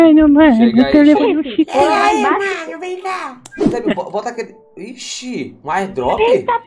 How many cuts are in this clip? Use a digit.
1